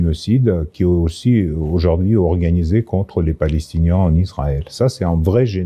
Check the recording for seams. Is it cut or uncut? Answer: uncut